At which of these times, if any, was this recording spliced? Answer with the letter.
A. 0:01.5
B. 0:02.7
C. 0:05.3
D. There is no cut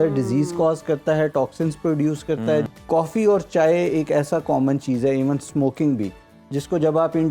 B